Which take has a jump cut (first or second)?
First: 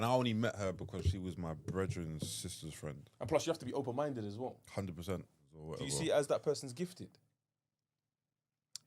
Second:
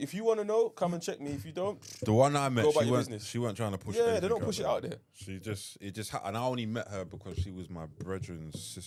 first